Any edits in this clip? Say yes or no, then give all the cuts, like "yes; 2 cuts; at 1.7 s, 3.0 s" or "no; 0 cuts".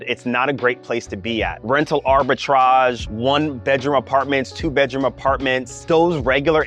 yes; 3 cuts; at 1.6 s, 3.1 s, 5.8 s